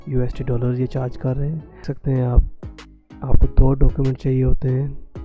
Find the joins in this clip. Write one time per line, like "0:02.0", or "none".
0:01.8